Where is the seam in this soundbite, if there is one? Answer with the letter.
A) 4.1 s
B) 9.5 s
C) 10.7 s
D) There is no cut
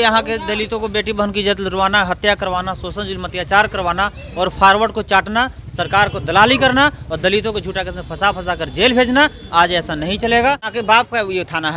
C